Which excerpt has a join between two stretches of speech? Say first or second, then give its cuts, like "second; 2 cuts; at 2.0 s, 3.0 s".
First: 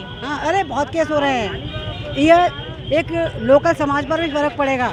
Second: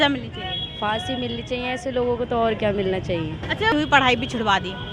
second; 1 cut; at 3.7 s